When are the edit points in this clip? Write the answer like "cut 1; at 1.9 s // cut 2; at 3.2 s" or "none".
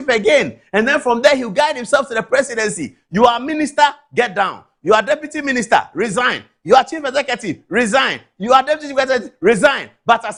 none